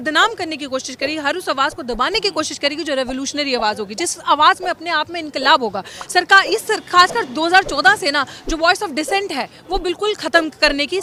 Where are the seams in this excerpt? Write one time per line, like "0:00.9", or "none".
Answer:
none